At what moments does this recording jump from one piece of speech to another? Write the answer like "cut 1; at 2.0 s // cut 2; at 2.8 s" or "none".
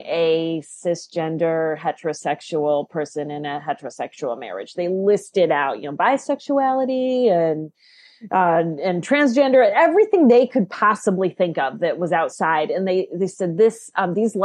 none